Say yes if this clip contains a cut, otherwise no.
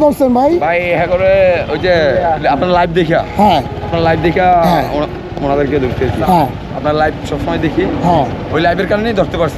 no